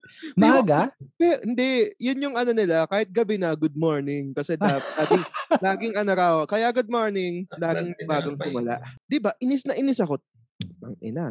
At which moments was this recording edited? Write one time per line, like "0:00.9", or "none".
0:08.9